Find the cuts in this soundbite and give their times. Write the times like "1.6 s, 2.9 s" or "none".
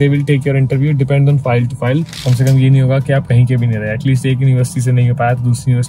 2.2 s